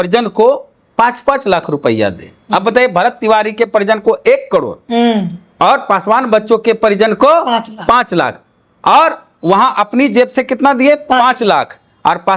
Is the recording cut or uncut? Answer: uncut